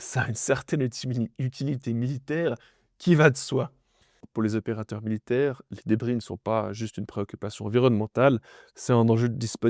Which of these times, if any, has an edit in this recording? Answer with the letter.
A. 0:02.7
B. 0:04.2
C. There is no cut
B